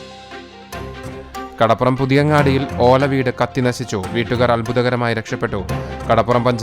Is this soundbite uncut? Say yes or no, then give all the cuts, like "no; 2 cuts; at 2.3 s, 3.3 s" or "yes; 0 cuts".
no; 1 cut; at 1.0 s